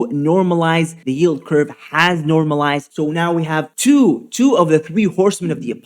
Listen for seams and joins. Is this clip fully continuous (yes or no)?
no